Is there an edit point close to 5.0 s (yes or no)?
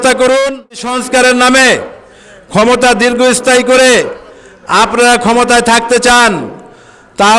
no